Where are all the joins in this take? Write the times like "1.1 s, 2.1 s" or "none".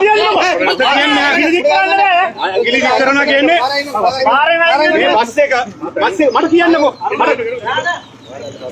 none